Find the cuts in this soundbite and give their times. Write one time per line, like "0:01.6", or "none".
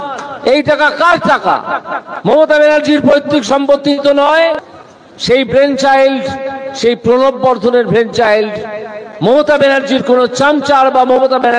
0:04.7